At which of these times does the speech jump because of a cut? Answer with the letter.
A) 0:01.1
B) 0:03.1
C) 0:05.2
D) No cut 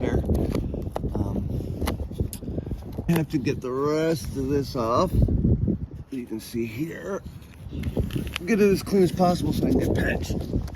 B